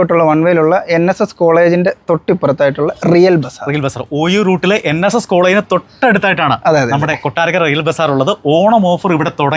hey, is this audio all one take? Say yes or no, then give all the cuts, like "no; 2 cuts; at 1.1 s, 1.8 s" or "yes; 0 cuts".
yes; 0 cuts